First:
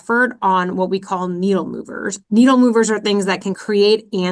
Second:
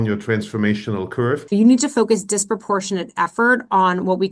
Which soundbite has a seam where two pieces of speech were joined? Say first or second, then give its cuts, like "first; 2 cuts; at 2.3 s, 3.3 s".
second; 1 cut; at 1.4 s